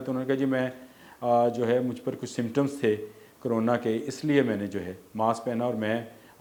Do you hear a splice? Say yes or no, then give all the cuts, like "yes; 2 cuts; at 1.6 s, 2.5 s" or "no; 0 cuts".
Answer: no; 0 cuts